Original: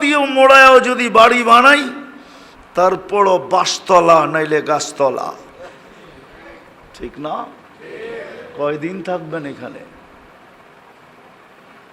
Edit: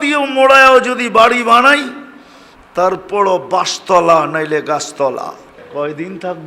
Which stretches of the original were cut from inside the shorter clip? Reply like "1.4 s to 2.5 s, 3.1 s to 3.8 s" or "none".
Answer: 5.5 s to 8.4 s